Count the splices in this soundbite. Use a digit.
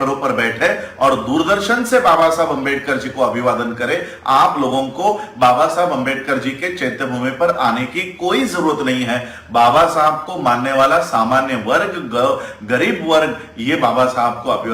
0